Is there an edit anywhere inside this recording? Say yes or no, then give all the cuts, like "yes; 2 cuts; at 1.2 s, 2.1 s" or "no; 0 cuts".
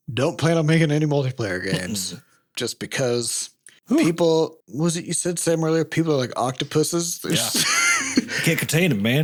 no; 0 cuts